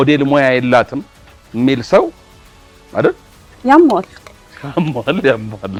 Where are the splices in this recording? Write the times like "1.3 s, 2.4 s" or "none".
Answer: none